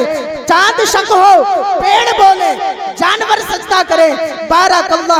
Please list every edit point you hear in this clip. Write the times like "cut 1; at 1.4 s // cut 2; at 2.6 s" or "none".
none